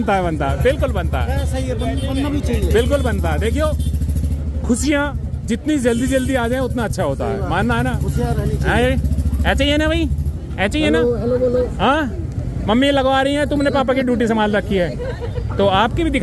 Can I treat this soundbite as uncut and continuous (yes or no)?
yes